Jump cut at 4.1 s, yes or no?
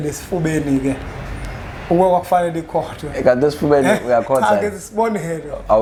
no